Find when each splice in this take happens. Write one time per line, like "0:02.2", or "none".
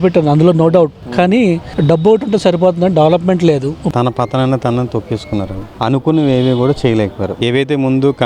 0:03.9
0:05.8